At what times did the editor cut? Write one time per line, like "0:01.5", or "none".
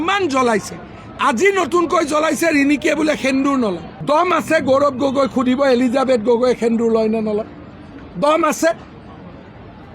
0:03.9